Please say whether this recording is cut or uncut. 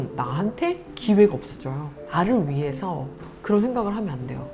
cut